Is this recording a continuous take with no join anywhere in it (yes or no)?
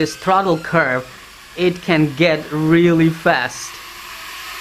yes